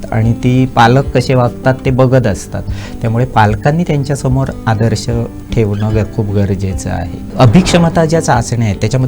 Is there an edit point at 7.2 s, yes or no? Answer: yes